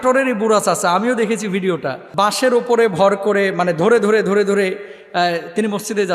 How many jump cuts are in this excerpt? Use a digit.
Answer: 1